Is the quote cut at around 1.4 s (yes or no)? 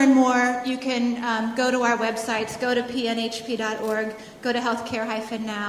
no